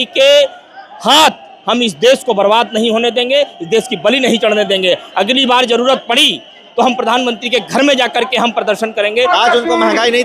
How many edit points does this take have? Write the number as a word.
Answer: one